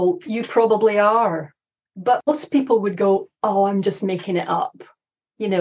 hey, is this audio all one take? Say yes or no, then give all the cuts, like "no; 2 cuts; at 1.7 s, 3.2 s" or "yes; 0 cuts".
no; 1 cut; at 2.1 s